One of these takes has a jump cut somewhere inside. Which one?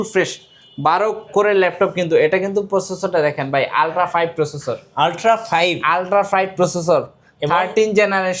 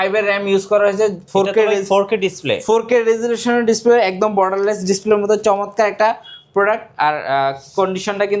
second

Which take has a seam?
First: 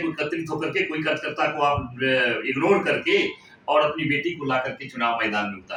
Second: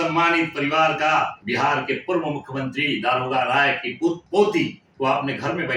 second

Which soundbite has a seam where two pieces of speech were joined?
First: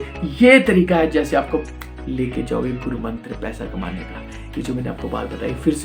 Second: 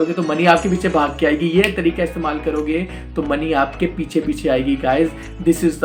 first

